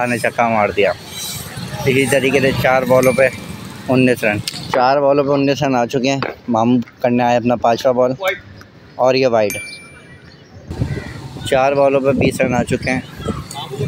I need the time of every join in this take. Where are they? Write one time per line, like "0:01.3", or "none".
none